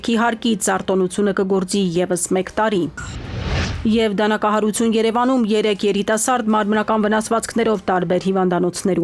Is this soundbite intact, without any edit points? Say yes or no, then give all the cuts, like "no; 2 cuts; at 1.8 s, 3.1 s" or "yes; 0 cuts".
yes; 0 cuts